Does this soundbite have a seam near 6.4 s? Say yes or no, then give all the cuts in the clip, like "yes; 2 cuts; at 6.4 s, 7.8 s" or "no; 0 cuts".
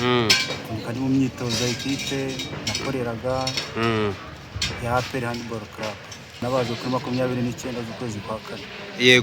yes; 1 cut; at 6.4 s